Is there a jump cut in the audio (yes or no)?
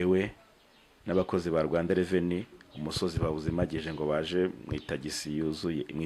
no